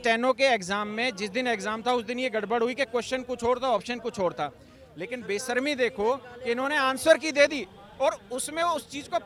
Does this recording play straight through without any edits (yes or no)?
yes